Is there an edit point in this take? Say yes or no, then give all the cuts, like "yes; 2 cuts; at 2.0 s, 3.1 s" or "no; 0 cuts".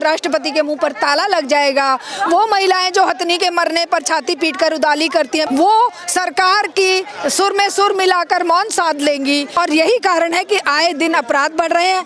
yes; 3 cuts; at 5.5 s, 7.2 s, 9.5 s